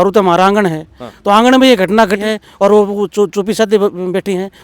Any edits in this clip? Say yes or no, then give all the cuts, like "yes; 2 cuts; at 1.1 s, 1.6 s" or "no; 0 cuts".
no; 0 cuts